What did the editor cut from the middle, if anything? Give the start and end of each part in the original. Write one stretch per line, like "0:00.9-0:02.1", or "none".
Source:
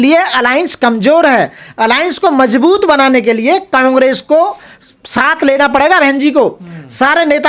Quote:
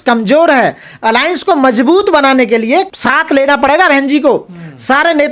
0:03.7-0:05.0